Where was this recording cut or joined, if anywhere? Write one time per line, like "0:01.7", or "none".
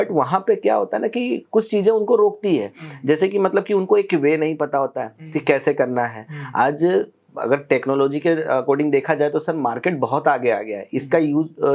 none